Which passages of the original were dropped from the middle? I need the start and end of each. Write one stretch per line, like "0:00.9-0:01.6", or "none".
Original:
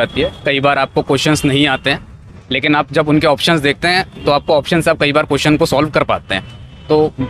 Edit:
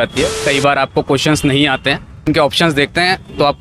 0:02.3-0:03.2